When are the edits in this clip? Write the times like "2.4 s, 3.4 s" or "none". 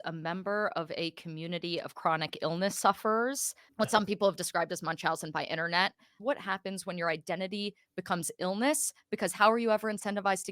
3.6 s, 6.1 s